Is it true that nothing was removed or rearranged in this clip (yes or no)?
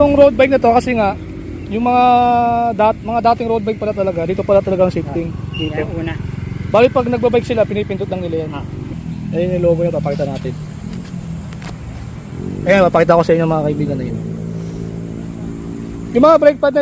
no